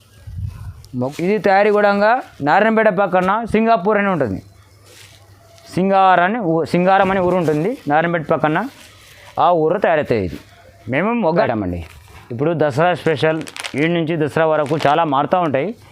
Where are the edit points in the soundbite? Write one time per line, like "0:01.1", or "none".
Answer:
0:01.0
0:11.3